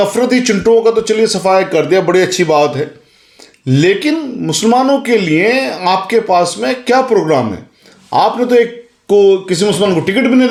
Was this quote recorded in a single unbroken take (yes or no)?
yes